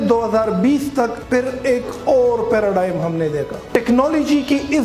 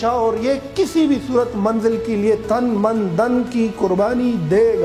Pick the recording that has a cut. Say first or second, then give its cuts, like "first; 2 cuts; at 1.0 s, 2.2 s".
first; 2 cuts; at 1.2 s, 3.5 s